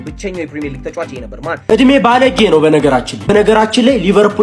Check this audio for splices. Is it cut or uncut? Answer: cut